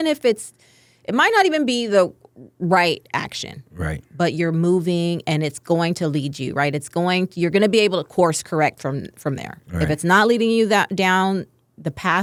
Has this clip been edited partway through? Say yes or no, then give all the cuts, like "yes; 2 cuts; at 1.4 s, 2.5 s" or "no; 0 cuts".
no; 0 cuts